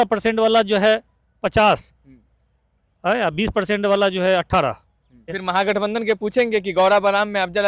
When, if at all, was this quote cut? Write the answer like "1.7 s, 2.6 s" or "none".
5.3 s